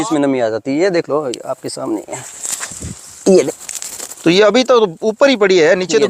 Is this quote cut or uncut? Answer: cut